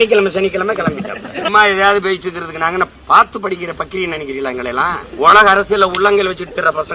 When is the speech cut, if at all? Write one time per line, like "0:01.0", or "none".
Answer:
0:01.5
0:03.0
0:05.1

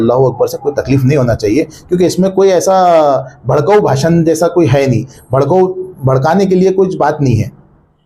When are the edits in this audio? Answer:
none

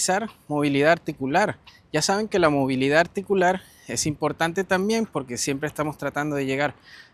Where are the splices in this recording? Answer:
none

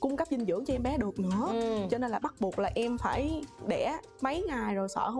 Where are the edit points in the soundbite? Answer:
0:04.1

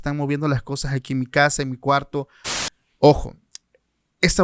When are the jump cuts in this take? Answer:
0:02.4

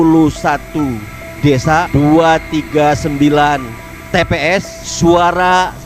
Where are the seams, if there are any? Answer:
0:01.9
0:04.8

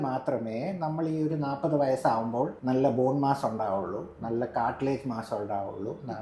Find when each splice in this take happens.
0:02.6

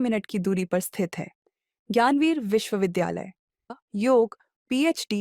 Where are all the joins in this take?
0:03.7

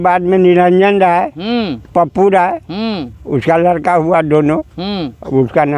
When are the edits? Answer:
none

